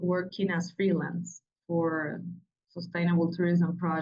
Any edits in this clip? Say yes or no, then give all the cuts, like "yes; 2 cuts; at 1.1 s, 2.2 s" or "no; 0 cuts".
no; 0 cuts